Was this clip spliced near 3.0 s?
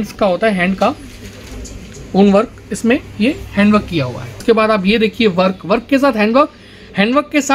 no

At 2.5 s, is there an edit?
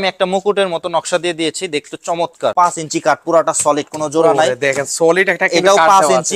yes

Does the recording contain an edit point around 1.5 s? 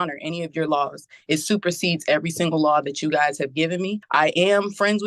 no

